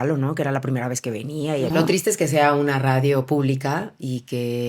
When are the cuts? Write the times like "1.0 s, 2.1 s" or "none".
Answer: 1.7 s